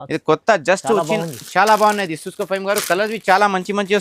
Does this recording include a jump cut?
no; 0 cuts

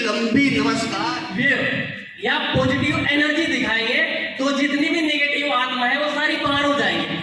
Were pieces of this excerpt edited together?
yes; 1 cut; at 1.1 s

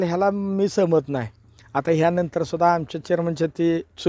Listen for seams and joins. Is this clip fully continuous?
yes; 0 cuts

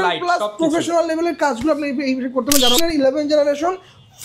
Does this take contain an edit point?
yes; 1 cut; at 2.8 s

